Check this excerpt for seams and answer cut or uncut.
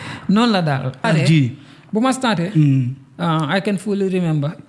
cut